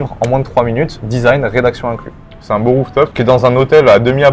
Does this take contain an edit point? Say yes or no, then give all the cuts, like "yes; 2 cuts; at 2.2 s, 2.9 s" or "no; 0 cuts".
yes; 2 cuts; at 2.3 s, 3.1 s